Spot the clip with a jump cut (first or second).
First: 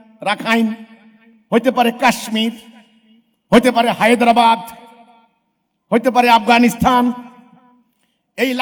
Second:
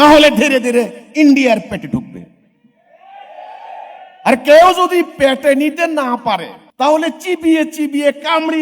second